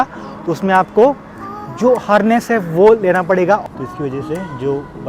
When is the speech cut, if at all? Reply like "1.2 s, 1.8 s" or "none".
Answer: 3.7 s